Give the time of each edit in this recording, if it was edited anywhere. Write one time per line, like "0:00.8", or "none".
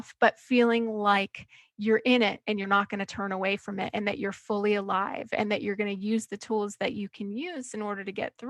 none